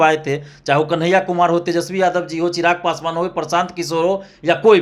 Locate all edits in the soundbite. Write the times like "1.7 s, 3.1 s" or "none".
none